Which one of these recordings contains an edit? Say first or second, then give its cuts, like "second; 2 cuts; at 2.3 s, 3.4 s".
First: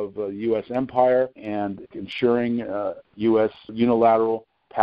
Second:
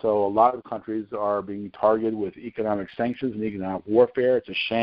first; 2 cuts; at 1.8 s, 3.7 s